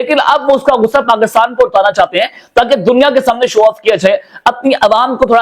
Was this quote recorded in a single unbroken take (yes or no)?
yes